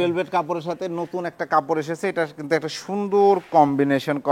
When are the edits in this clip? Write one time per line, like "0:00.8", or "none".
none